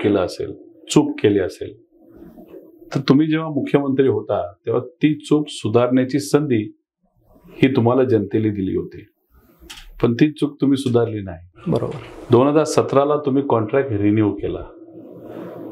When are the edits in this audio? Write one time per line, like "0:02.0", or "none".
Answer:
none